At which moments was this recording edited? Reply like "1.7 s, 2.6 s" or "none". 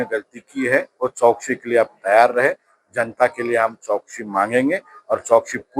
none